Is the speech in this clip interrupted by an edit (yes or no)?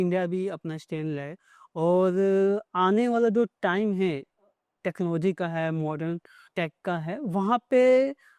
yes